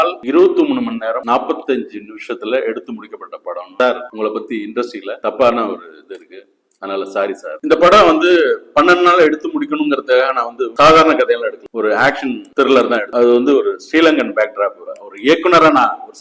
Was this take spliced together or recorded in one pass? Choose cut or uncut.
cut